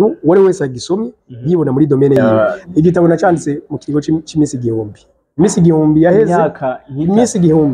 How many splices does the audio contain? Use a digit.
1